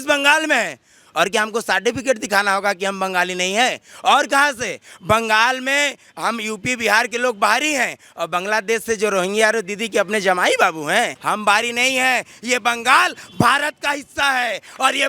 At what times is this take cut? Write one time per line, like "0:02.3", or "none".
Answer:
0:11.2